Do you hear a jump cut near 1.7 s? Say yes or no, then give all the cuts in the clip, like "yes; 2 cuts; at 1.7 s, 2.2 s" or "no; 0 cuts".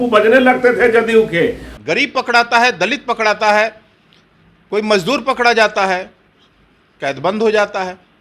yes; 1 cut; at 1.7 s